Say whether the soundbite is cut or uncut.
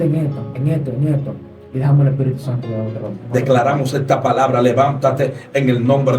cut